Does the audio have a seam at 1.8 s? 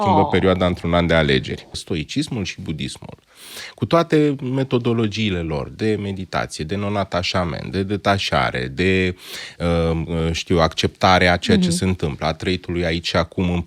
yes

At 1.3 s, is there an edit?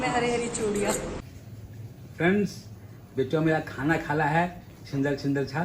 yes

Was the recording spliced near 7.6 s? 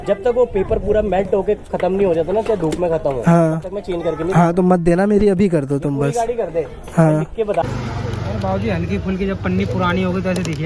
yes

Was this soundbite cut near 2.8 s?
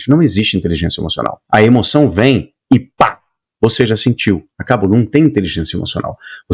no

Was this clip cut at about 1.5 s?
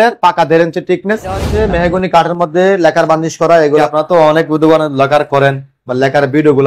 yes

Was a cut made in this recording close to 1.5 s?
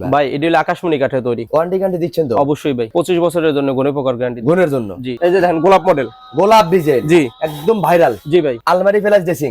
yes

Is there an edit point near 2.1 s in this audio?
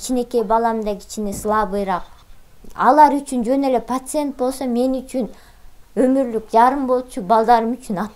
yes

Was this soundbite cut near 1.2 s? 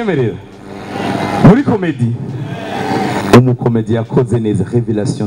no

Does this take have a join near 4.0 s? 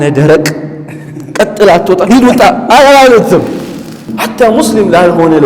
yes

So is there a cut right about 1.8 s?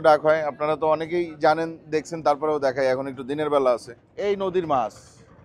no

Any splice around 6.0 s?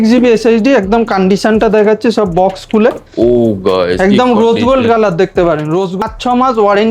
yes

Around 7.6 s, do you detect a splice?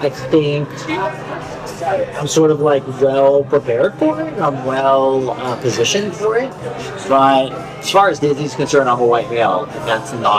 yes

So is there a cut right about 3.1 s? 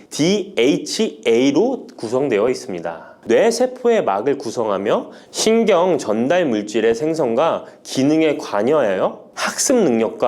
yes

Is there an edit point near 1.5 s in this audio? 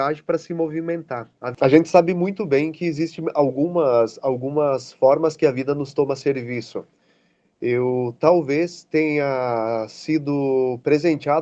yes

